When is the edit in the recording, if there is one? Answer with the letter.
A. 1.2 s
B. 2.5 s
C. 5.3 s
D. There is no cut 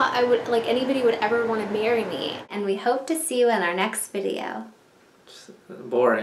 B